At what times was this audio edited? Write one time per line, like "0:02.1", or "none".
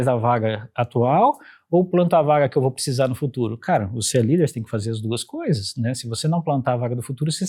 none